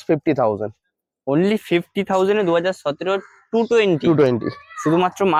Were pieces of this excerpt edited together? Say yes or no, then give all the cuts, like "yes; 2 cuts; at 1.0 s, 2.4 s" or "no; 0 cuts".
no; 0 cuts